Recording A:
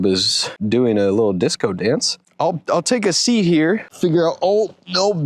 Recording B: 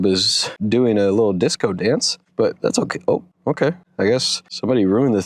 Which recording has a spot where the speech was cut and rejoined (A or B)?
A